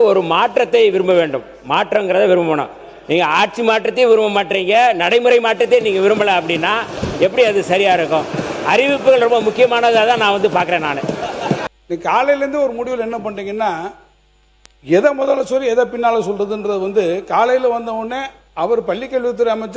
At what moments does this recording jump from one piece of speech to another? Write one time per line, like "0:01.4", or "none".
0:11.6